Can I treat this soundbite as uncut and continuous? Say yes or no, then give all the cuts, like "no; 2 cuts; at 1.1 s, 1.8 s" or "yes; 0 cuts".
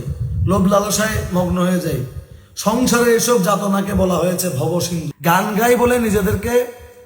no; 1 cut; at 5.0 s